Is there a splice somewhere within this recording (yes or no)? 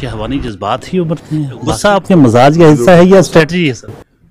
yes